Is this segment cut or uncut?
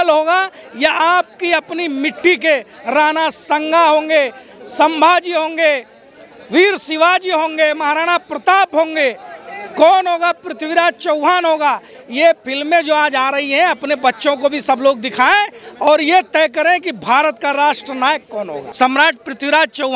cut